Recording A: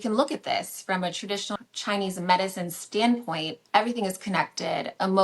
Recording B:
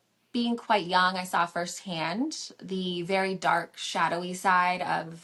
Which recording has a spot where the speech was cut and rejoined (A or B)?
A